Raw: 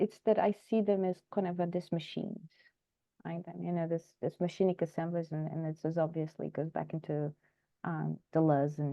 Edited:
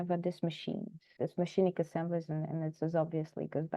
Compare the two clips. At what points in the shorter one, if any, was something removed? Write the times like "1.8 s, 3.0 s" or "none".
1.1 s